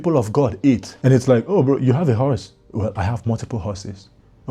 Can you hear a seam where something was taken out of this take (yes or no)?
yes